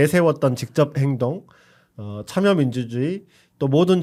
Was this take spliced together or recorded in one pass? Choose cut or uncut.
uncut